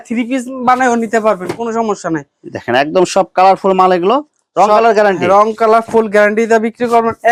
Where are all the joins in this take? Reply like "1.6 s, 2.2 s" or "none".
none